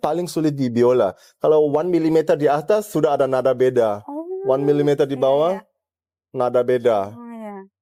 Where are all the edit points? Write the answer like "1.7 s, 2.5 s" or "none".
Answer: none